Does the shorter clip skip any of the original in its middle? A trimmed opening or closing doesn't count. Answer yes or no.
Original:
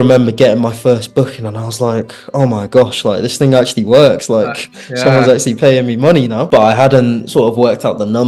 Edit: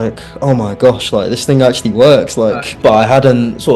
yes